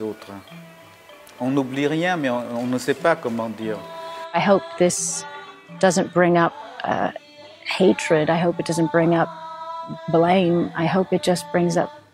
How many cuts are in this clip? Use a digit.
1